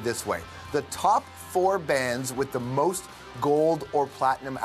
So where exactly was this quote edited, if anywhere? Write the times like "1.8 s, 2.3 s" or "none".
1.3 s

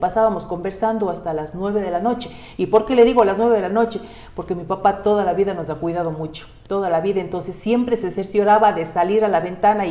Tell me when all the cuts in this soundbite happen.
none

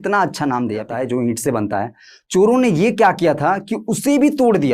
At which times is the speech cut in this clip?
0.9 s

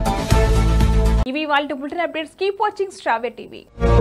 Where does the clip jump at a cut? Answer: none

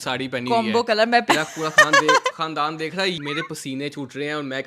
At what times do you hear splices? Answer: 1.2 s, 3.2 s

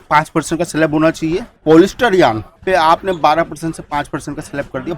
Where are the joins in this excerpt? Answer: 1.5 s, 2.5 s

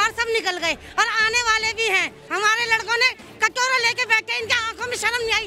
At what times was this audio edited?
2.2 s

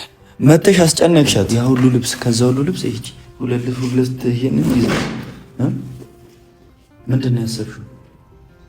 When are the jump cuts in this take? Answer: 1.5 s

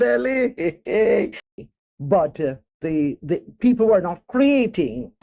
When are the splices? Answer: 1.5 s

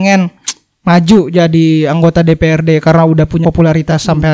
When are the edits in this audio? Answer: 3.4 s

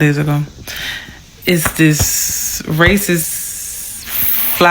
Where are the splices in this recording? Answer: 3.2 s

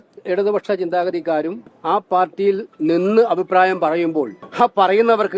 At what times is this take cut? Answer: 1.7 s, 4.4 s

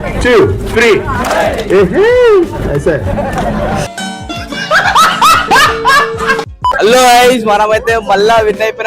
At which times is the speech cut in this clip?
6.7 s

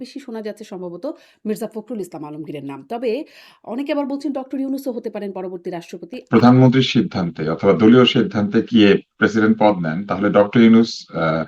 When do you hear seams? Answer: 6.2 s

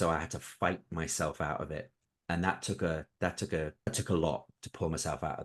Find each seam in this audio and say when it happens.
2.0 s, 3.9 s

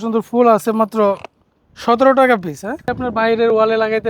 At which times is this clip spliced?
2.9 s

